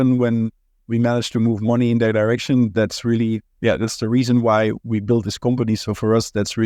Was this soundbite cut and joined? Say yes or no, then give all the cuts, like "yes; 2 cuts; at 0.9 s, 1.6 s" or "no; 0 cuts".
no; 0 cuts